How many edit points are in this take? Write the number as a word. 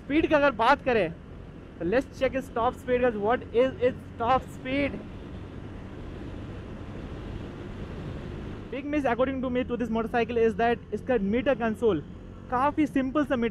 one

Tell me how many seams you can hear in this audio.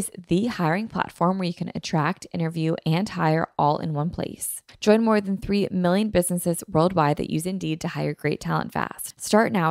one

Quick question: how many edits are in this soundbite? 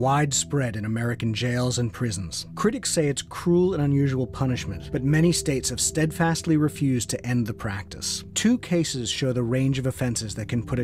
zero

